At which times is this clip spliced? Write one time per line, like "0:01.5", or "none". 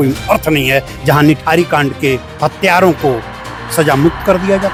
none